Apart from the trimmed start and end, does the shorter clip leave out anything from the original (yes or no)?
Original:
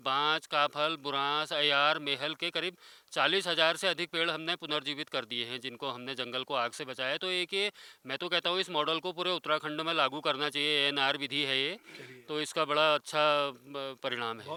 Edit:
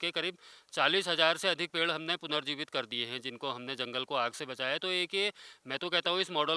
no